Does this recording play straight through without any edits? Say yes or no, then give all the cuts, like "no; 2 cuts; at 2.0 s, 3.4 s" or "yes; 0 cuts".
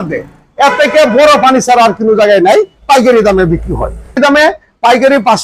no; 1 cut; at 4.2 s